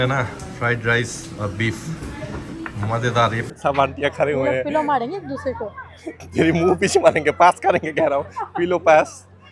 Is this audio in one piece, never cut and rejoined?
no; 2 cuts; at 3.5 s, 7.6 s

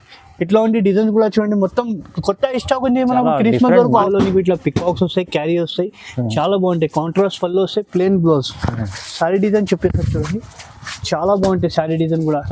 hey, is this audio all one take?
no; 1 cut; at 4.1 s

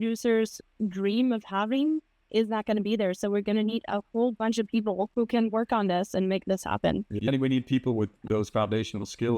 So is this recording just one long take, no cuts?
no; 3 cuts; at 5.1 s, 7.2 s, 8.2 s

